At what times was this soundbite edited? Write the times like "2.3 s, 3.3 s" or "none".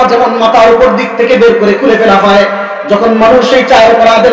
none